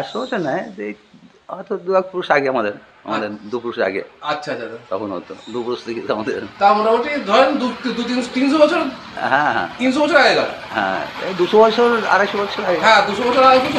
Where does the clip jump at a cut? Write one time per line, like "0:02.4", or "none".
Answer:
none